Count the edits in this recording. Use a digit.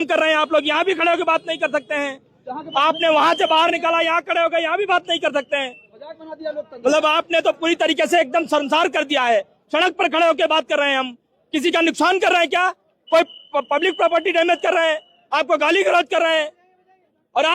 0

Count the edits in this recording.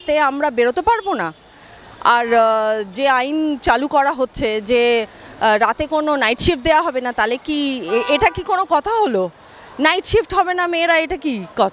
0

